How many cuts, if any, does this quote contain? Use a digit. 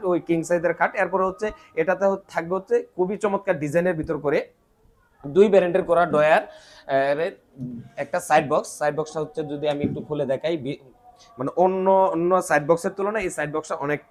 0